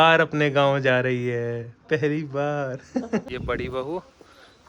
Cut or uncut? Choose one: cut